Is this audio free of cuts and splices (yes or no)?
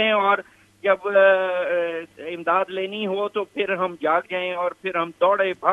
yes